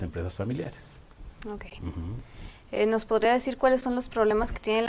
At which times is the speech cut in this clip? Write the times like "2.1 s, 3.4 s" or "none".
2.9 s